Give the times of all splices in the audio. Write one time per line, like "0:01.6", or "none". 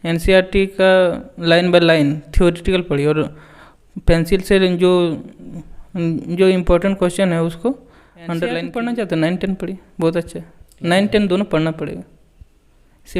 0:08.6